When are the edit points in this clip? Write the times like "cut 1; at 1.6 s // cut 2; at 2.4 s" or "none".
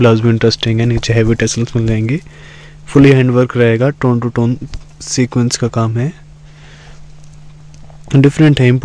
none